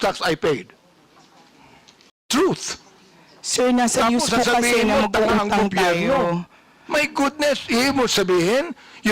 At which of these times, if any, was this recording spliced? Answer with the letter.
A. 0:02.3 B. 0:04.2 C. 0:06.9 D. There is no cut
A